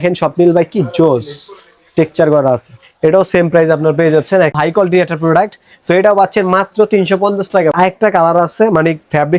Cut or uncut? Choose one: cut